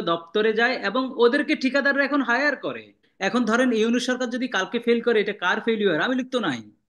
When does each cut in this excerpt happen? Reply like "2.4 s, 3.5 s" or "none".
3.1 s